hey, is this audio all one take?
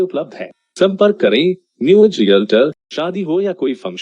no; 1 cut; at 2.9 s

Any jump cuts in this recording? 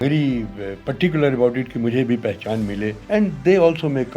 yes; 1 cut; at 3.0 s

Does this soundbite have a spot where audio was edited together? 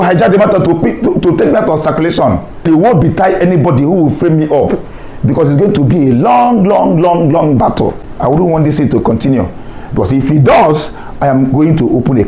yes; 2 cuts; at 2.6 s, 8.1 s

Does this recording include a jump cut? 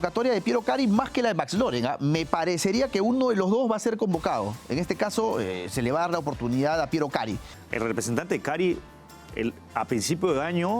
yes; 1 cut; at 7.6 s

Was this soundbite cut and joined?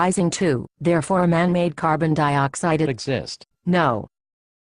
no; 0 cuts

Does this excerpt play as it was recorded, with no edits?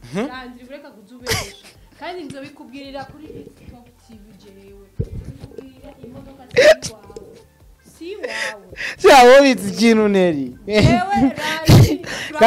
yes; 0 cuts

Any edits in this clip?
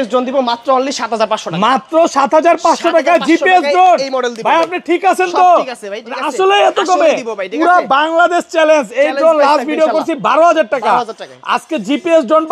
no; 0 cuts

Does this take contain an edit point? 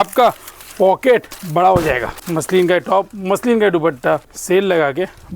yes; 2 cuts; at 2.2 s, 4.3 s

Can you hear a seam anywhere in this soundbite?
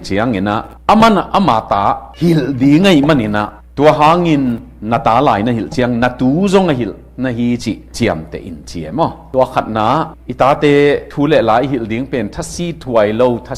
no; 0 cuts

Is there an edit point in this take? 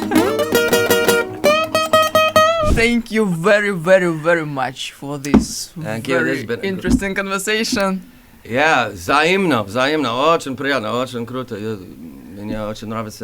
yes; 1 cut; at 2.7 s

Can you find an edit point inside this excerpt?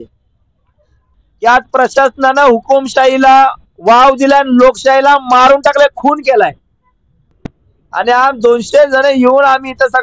yes; 2 cuts; at 1.1 s, 7.3 s

